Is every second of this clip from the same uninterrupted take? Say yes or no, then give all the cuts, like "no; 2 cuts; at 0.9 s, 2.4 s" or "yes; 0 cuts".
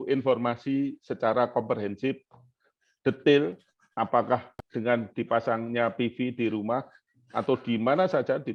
yes; 0 cuts